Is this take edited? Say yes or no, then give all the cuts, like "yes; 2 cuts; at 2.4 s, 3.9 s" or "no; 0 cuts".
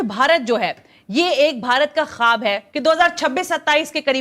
yes; 1 cut; at 2.8 s